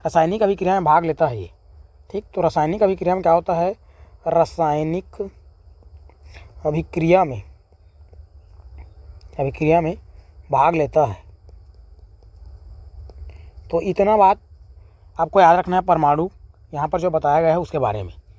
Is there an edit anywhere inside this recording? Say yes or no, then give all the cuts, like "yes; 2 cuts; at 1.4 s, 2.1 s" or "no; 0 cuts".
no; 0 cuts